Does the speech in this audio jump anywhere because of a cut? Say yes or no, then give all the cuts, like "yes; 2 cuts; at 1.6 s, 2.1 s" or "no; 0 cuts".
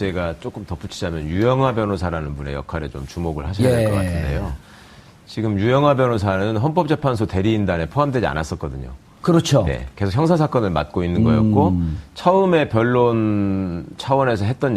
yes; 1 cut; at 1.4 s